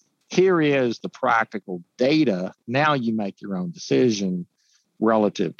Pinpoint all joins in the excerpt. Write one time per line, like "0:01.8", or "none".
none